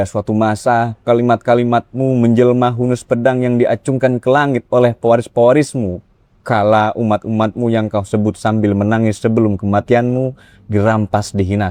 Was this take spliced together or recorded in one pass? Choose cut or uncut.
uncut